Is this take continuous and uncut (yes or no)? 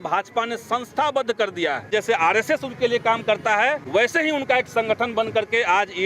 no